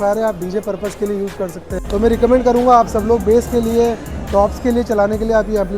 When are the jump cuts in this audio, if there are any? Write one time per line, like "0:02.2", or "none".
0:01.7

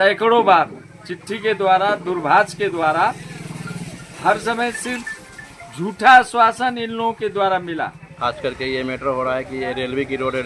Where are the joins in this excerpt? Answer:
0:08.0

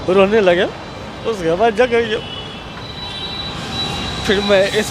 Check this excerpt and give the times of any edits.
none

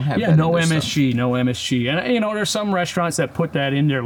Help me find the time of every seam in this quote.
none

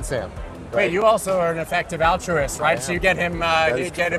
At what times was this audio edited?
none

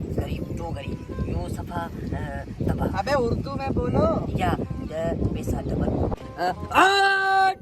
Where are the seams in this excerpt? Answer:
0:06.1

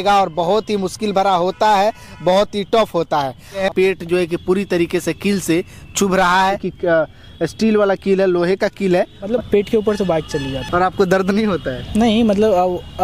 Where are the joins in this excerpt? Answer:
0:03.6
0:06.7
0:09.3
0:10.6

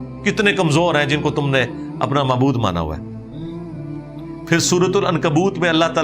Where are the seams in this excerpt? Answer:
none

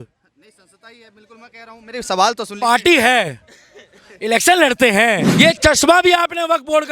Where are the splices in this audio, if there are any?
0:05.3

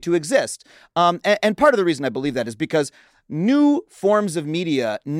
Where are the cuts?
none

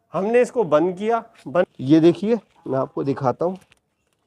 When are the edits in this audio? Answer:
0:01.7

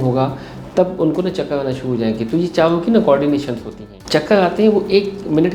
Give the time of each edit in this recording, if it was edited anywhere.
0:04.0

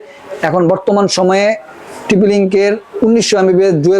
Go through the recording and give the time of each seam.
none

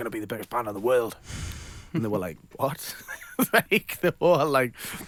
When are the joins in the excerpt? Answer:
none

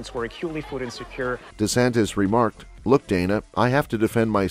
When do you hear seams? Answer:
none

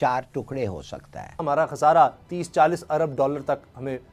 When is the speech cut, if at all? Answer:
0:01.4

